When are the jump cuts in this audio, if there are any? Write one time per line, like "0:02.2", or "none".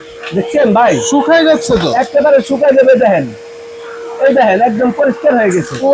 none